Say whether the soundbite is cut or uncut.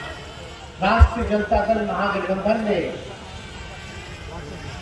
uncut